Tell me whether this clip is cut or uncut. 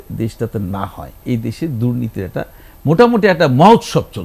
cut